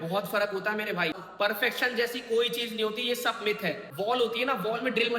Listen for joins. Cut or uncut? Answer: cut